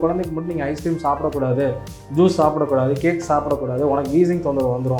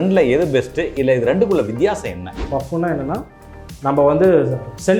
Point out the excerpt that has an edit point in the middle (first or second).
second